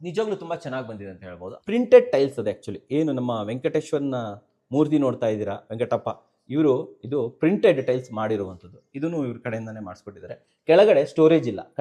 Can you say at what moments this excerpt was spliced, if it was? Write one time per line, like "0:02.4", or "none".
0:01.5